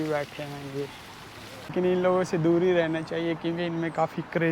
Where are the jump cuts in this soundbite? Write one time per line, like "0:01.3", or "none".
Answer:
0:01.7